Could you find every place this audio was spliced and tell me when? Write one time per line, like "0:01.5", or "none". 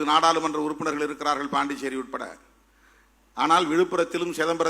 none